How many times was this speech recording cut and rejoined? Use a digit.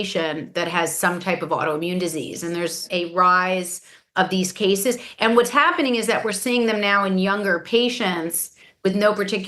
2